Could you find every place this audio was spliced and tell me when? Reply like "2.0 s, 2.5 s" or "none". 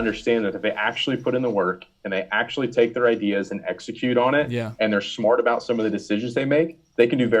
none